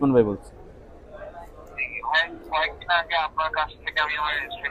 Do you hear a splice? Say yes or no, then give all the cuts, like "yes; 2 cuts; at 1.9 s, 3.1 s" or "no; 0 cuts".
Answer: no; 0 cuts